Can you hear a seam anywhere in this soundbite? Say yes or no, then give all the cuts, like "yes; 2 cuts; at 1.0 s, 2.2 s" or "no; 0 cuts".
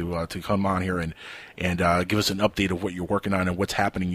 yes; 1 cut; at 3.2 s